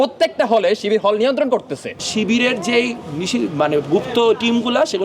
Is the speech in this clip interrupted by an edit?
yes; 1 cut; at 2.0 s

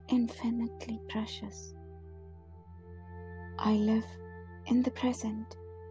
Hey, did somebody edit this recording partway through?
yes; 2 cuts; at 1.5 s, 3.6 s

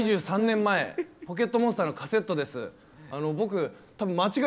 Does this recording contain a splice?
no; 0 cuts

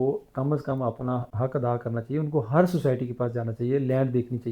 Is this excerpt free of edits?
no; 1 cut; at 1.3 s

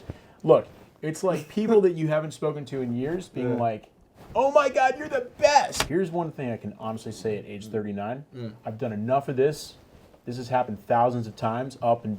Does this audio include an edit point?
yes; 1 cut; at 5.8 s

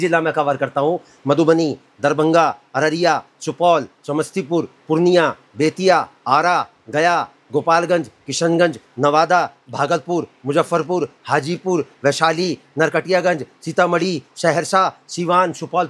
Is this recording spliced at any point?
no; 0 cuts

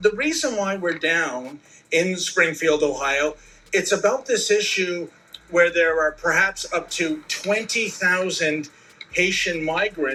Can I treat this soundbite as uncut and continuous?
yes; 0 cuts

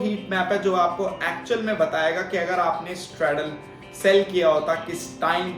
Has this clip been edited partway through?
no; 0 cuts

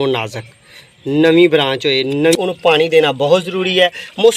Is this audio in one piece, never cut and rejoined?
no; 1 cut; at 2.3 s

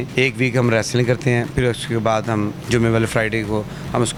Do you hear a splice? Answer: no; 0 cuts

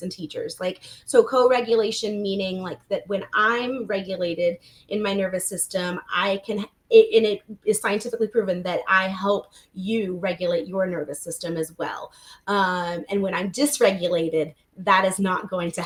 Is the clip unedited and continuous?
yes; 0 cuts

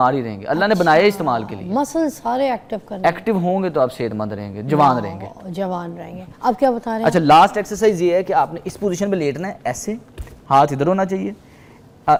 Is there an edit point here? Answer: no; 0 cuts

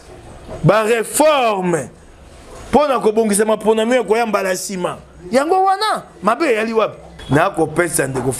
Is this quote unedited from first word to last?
no; 1 cut; at 7.1 s

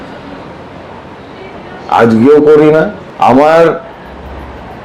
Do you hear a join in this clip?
yes; 1 cut; at 3.0 s

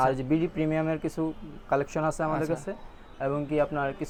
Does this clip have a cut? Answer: no; 0 cuts

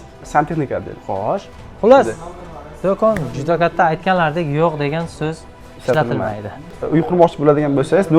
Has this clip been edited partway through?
yes; 2 cuts; at 1.5 s, 6.8 s

